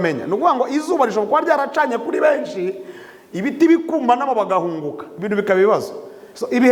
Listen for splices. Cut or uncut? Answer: uncut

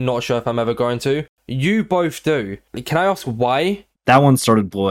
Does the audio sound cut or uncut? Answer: cut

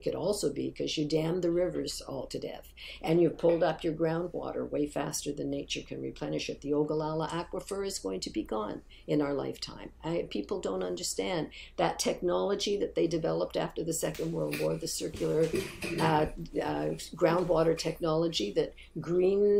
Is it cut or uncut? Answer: uncut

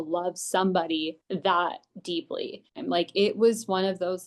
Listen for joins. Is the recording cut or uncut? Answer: cut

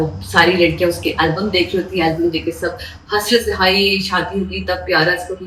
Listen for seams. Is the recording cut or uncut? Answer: uncut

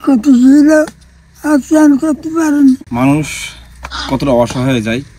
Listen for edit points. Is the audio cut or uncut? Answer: cut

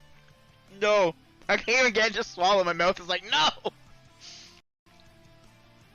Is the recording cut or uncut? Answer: uncut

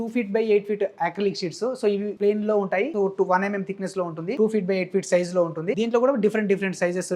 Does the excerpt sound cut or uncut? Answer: cut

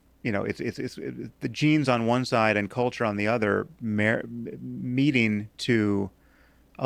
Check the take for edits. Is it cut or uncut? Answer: uncut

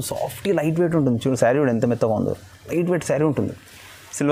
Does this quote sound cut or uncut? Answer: uncut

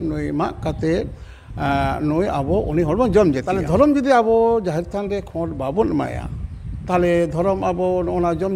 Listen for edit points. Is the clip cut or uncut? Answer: cut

